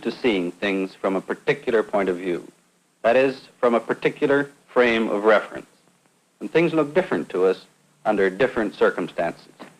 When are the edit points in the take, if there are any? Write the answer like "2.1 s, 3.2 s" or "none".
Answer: 4.4 s

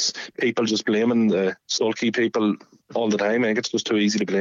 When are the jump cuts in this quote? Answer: none

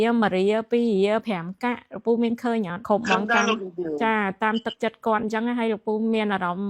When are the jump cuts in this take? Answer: 2.8 s

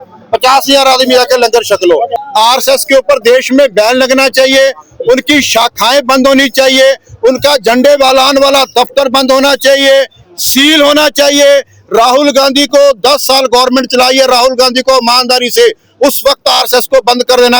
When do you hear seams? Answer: 2.2 s

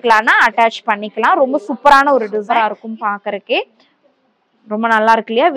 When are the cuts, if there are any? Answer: 2.4 s

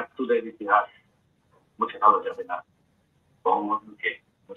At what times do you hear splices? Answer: none

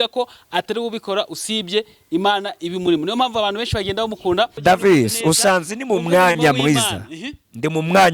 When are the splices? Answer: 4.6 s

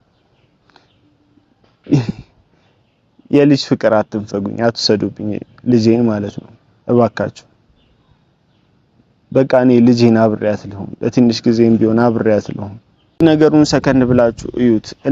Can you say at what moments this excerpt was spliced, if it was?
13.2 s

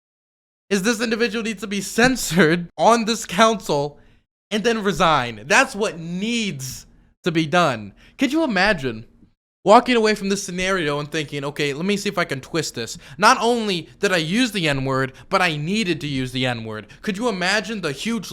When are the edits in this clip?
2.7 s

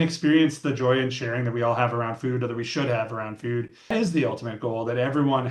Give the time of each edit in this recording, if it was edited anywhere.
3.9 s

